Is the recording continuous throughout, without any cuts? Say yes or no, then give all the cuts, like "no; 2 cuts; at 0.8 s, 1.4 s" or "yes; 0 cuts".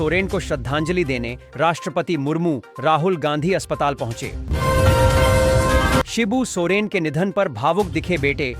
no; 2 cuts; at 4.4 s, 6.1 s